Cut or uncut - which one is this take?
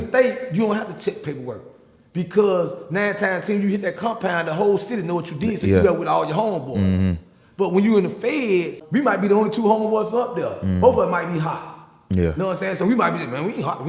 cut